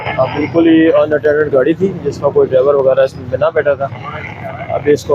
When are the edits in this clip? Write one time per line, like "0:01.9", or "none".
none

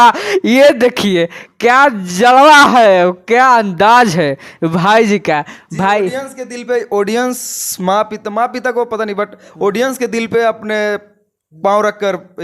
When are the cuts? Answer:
none

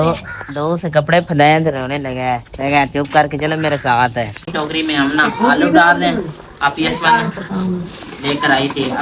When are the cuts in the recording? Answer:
0:04.5

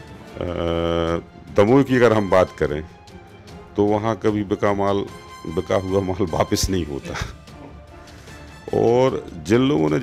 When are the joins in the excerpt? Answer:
0:07.3
0:08.6

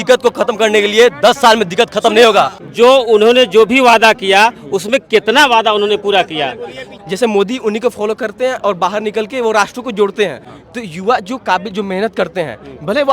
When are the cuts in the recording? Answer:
0:02.6
0:06.9
0:10.5

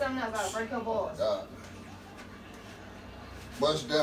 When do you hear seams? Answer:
none

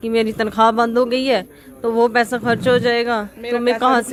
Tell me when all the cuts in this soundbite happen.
none

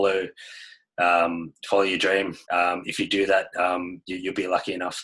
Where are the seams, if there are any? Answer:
0:02.4

